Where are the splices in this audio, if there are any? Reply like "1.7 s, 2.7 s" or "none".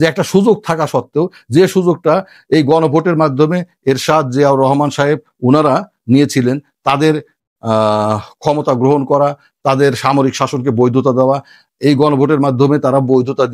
none

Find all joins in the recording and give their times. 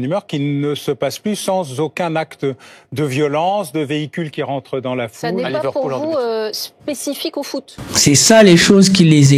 7.8 s

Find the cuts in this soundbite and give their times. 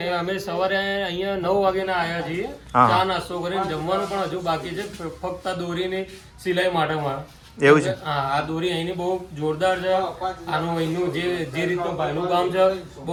none

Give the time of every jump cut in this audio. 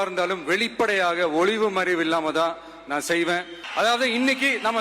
3.6 s

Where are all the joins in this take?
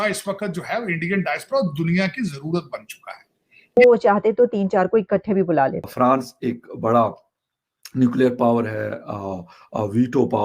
3.8 s, 5.8 s

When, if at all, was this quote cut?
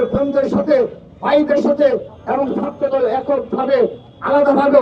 2.1 s

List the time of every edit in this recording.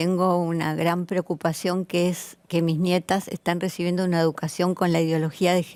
none

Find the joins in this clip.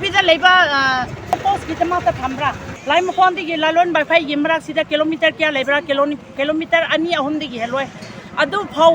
2.7 s

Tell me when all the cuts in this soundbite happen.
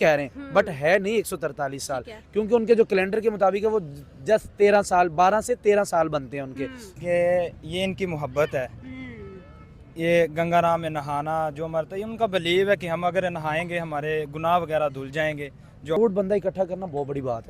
7.0 s, 16.0 s

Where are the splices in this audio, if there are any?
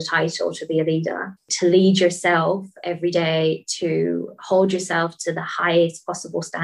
1.5 s

